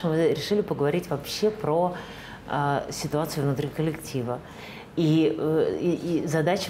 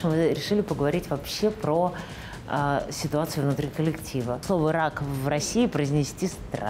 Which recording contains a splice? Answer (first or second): second